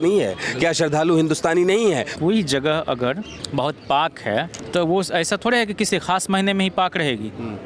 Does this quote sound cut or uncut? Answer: cut